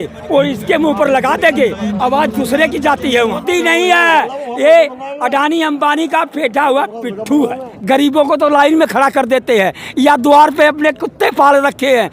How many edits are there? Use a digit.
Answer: 2